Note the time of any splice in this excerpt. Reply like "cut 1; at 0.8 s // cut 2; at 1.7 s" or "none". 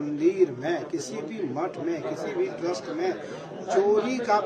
none